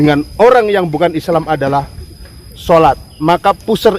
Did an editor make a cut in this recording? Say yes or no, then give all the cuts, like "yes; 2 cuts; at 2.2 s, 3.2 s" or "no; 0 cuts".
no; 0 cuts